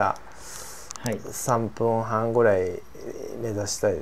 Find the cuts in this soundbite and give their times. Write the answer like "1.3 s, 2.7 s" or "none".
none